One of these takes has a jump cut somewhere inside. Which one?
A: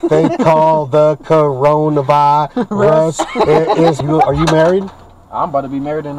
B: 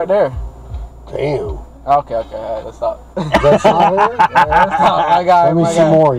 A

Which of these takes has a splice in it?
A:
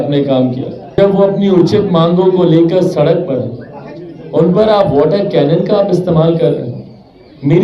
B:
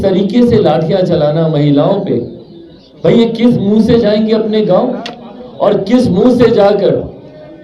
A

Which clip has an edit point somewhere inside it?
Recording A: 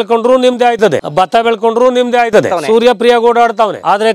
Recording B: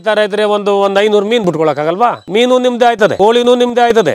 A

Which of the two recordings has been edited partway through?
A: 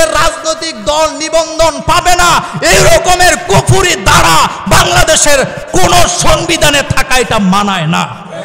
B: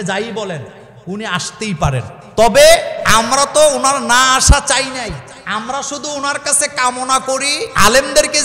B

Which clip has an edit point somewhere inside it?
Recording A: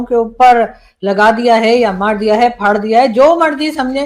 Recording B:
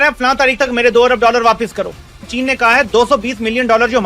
B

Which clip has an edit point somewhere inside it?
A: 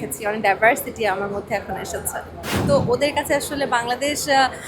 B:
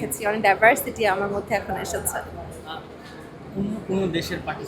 A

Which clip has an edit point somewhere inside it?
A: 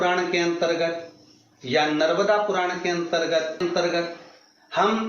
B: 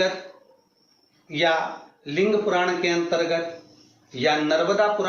A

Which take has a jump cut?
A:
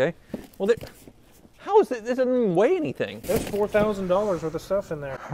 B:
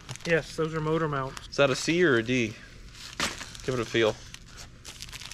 B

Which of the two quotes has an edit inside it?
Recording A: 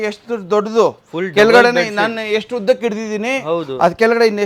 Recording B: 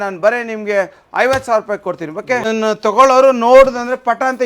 B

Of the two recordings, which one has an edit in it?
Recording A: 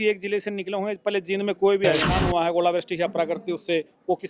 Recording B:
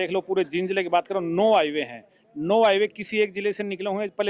A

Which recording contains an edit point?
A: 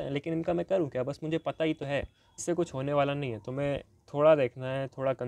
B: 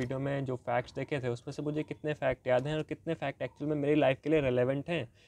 A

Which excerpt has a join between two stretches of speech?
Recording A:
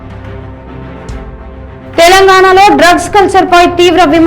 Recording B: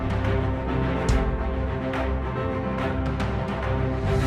A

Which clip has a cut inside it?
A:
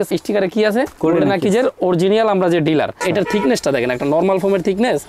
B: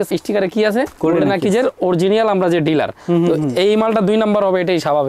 A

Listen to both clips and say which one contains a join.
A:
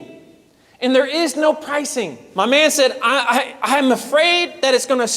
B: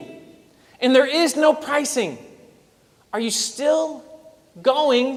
A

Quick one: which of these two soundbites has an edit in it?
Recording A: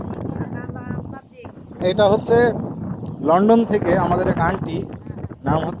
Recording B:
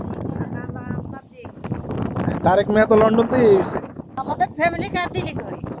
B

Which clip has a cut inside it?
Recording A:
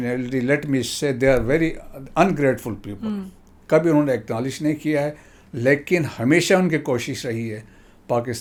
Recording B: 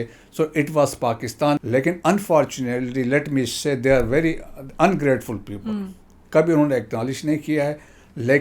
B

